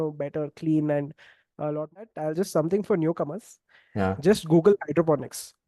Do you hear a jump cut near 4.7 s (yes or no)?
no